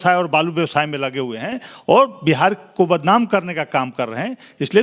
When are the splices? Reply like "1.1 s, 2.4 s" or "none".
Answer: none